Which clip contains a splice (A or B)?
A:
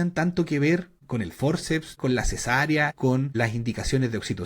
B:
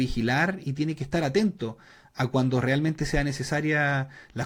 A